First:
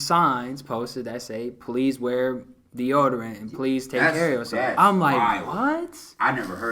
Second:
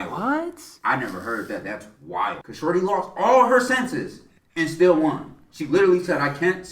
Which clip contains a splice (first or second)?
second